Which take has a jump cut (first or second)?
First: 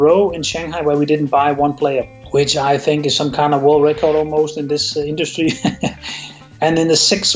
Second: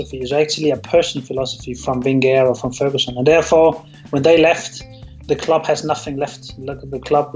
first